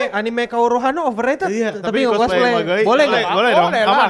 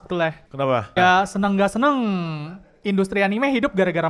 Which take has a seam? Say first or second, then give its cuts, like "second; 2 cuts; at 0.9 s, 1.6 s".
second; 1 cut; at 1.0 s